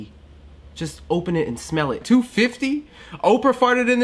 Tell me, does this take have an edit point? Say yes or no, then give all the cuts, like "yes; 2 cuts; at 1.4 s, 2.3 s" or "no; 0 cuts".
yes; 1 cut; at 2.0 s